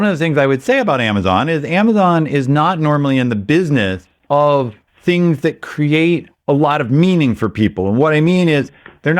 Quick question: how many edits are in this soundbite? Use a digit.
3